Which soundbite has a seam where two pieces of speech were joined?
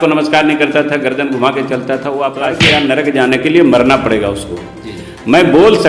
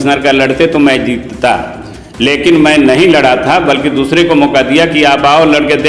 first; 1 cut; at 2.6 s

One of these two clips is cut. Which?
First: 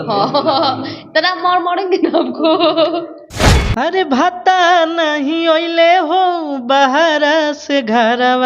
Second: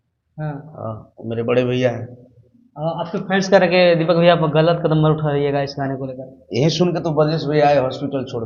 first; 1 cut; at 3.5 s

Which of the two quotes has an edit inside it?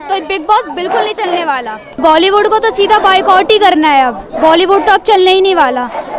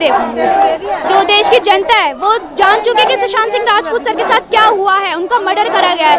first; 1 cut; at 1.9 s

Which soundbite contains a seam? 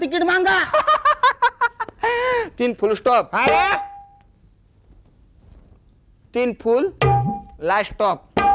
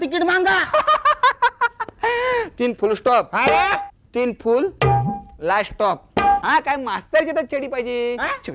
second; 2 cuts; at 4.0 s, 6.4 s

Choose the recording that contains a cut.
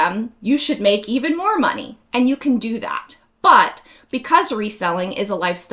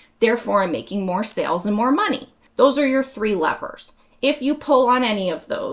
second; 1 cut; at 2.4 s

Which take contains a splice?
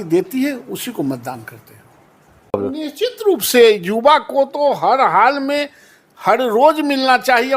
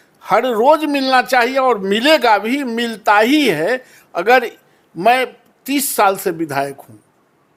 first; 1 cut; at 2.6 s

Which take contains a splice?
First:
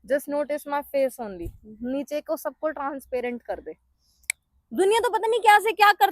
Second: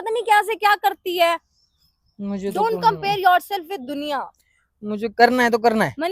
first; 1 cut; at 3.8 s

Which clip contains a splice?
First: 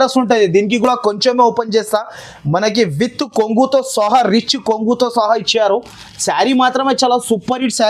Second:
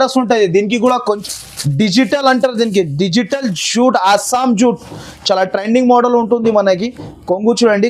second; 1 cut; at 1.0 s

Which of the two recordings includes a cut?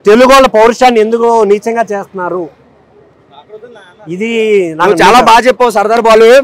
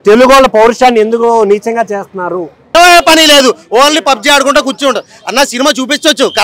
second; 1 cut; at 2.7 s

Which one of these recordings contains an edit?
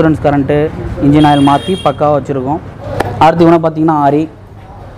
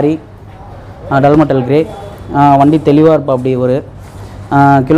first; 1 cut; at 2.9 s

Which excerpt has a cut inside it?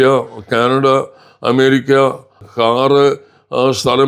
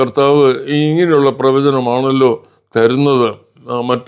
first; 1 cut; at 2.4 s

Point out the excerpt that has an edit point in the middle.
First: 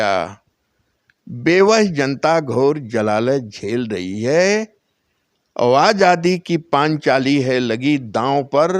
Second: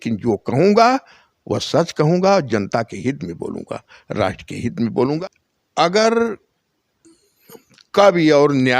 second; 1 cut; at 5.0 s

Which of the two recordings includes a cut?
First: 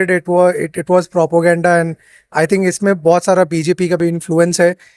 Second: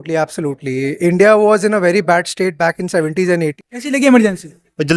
second; 1 cut; at 3.4 s

